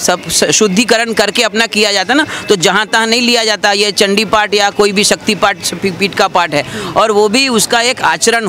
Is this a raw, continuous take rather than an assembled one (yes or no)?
yes